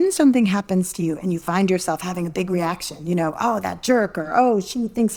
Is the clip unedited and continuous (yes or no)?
yes